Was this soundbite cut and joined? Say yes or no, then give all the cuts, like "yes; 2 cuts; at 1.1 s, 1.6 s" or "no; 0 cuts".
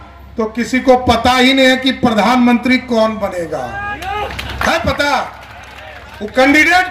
no; 0 cuts